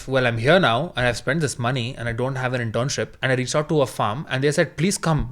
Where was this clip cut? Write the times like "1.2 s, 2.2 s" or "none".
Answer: 3.2 s